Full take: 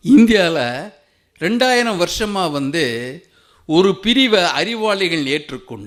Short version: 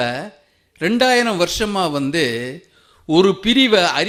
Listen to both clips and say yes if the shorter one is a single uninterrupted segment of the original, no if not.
yes